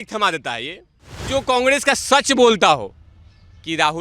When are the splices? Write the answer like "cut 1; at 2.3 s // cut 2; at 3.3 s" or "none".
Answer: cut 1; at 1.3 s